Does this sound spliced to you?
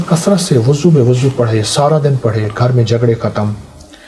no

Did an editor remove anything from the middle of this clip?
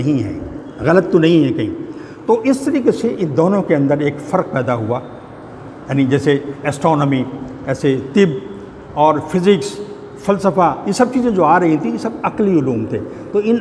no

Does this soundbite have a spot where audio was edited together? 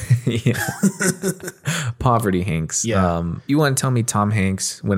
yes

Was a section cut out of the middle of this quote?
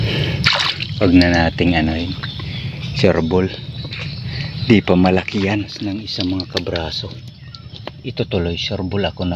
yes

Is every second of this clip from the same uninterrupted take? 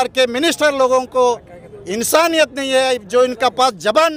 yes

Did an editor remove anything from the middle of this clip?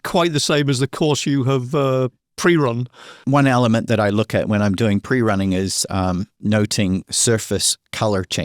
yes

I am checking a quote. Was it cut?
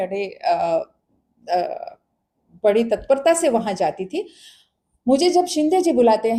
no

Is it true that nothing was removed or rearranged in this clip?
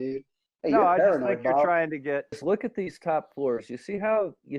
no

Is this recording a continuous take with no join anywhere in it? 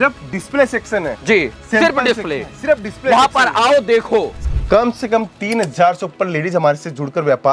no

